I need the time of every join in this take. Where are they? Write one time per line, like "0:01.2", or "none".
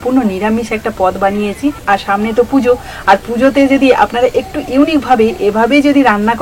none